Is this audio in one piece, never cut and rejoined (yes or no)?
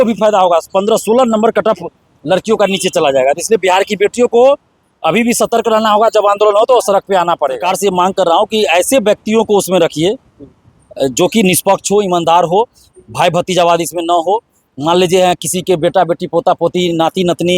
no